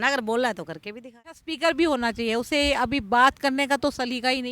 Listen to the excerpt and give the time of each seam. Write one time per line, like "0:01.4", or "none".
0:01.5